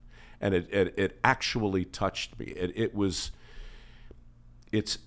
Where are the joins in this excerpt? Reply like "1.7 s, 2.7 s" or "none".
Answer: none

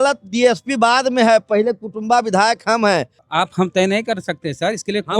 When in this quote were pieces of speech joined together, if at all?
3.2 s

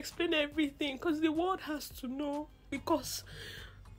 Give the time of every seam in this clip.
2.6 s

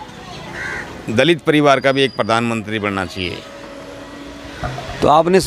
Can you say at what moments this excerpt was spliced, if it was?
none

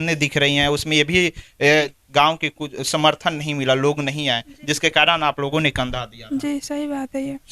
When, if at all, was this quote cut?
1.9 s

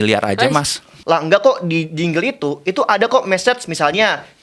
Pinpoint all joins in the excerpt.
0.9 s

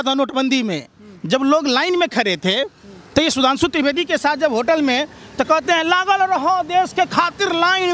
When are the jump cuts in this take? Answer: none

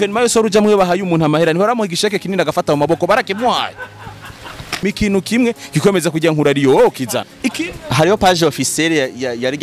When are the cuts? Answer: 4.8 s, 7.3 s

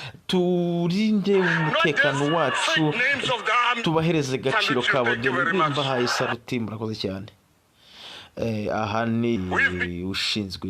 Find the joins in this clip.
9.4 s

